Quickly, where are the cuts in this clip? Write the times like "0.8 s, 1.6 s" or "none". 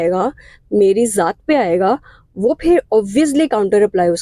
none